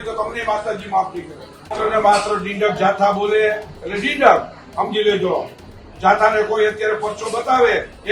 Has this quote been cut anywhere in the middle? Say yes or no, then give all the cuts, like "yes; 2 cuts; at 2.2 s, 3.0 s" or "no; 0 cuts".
yes; 1 cut; at 1.7 s